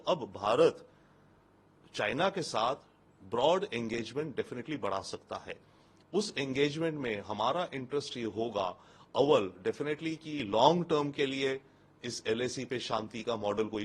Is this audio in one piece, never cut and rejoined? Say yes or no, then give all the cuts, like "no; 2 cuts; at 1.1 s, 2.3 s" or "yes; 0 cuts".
yes; 0 cuts